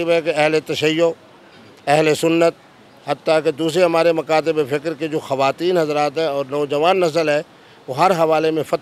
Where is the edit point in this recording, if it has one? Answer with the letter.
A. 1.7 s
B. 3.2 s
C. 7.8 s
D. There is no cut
D